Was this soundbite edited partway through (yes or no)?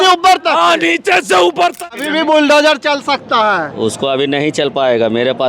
yes